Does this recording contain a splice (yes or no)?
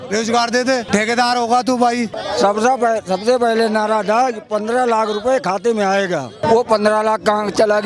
yes